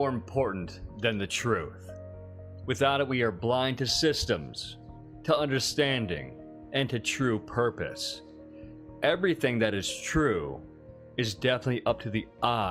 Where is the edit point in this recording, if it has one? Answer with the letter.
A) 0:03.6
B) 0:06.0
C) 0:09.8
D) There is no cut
C